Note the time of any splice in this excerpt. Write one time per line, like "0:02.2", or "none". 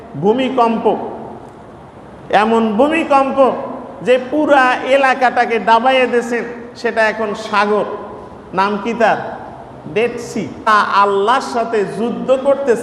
0:10.7